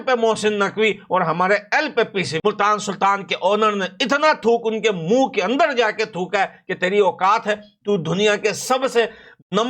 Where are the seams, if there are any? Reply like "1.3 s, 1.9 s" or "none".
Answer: 2.4 s